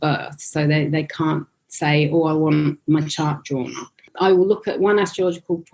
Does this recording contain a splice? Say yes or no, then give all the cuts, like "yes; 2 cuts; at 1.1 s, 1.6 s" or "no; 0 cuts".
yes; 1 cut; at 4.1 s